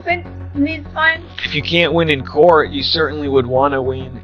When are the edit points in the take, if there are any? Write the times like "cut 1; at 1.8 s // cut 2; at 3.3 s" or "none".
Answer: cut 1; at 1.0 s